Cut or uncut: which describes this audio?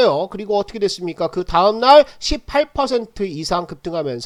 uncut